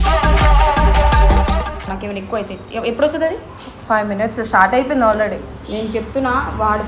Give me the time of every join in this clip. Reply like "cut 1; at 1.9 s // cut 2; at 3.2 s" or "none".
cut 1; at 1.9 s